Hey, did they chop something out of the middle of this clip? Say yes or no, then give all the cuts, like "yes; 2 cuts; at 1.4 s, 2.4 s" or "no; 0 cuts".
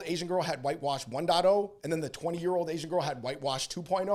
no; 0 cuts